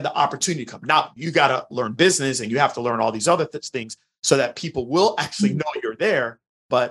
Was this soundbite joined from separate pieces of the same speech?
no; 0 cuts

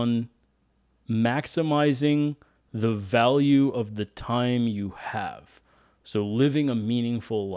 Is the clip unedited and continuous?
yes; 0 cuts

